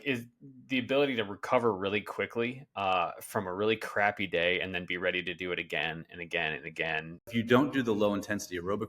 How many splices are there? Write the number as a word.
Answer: one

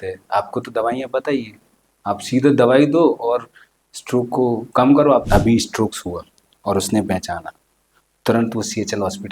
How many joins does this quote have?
one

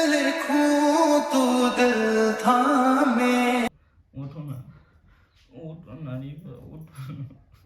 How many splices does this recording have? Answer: one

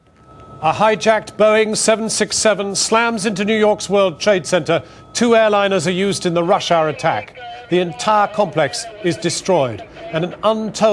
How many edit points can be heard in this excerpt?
zero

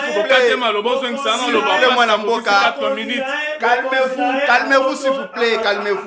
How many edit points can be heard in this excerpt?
zero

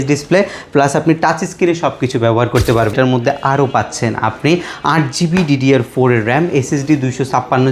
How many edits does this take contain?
one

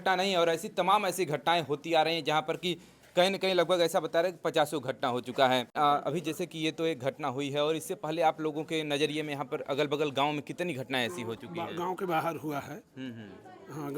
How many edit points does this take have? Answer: zero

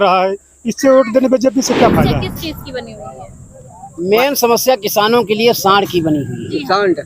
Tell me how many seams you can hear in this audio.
one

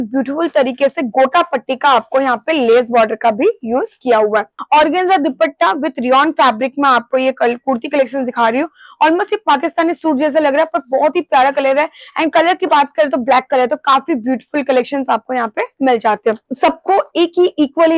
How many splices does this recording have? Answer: two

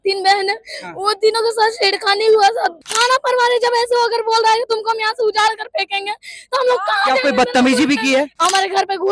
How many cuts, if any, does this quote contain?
two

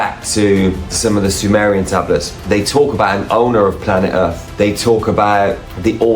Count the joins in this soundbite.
one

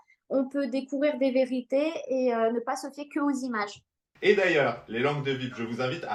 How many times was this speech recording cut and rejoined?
zero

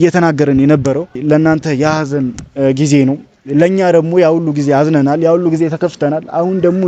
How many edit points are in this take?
one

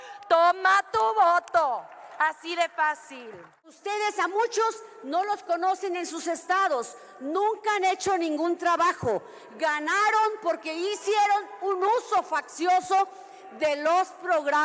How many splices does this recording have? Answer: one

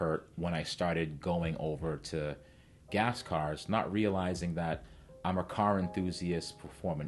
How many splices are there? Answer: zero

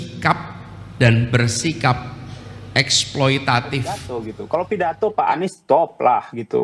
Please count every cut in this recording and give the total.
one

